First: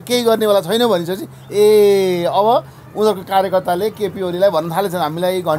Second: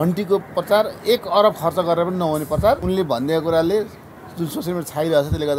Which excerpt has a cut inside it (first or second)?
second